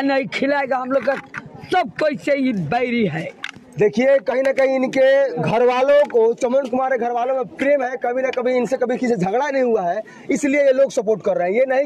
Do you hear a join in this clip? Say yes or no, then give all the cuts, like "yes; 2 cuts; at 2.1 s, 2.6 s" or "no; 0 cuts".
no; 0 cuts